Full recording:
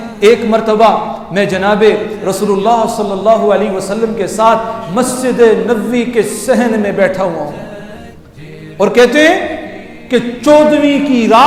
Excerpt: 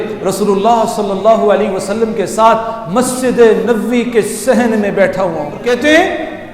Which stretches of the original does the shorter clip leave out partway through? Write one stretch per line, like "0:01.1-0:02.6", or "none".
0:07.6-0:08.9